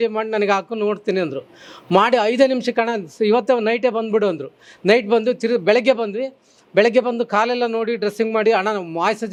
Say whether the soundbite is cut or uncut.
uncut